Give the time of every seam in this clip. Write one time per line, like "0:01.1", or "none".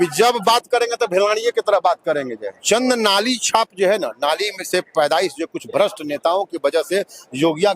0:02.5